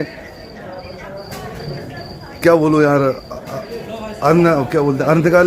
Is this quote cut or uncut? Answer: uncut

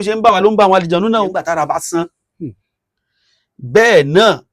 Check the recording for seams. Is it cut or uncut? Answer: cut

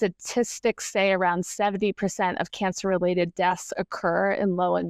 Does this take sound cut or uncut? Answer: uncut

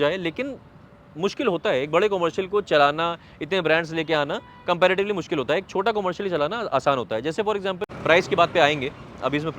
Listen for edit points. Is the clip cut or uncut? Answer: cut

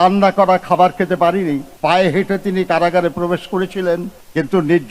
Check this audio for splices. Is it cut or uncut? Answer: cut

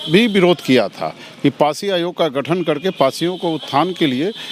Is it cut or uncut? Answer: uncut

